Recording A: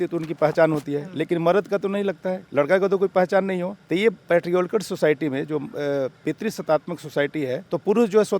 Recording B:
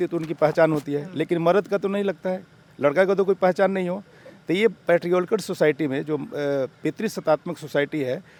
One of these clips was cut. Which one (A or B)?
A